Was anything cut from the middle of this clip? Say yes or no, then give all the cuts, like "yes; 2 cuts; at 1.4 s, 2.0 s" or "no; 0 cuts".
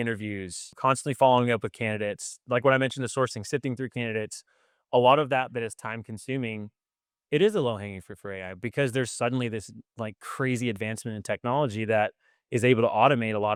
no; 0 cuts